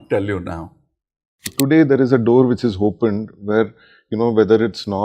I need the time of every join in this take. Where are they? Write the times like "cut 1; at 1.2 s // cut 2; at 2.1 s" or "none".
cut 1; at 1.5 s